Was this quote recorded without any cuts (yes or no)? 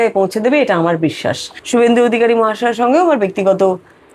no